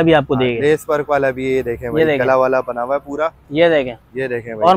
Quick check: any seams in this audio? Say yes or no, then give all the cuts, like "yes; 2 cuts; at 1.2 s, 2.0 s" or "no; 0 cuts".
no; 0 cuts